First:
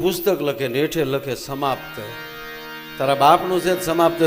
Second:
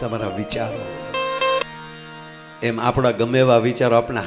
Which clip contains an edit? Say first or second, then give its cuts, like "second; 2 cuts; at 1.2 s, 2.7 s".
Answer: second; 1 cut; at 1.6 s